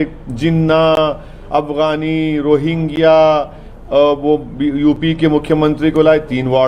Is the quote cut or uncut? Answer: uncut